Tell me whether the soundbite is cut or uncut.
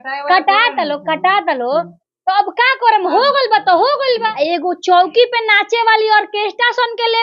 cut